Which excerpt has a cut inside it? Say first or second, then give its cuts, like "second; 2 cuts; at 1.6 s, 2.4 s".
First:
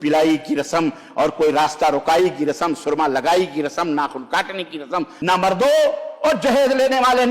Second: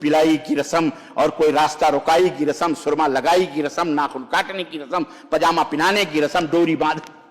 first; 1 cut; at 5.1 s